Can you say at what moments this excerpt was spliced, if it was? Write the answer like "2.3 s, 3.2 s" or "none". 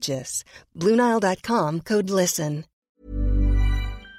2.8 s